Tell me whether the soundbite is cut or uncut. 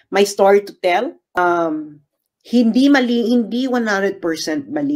cut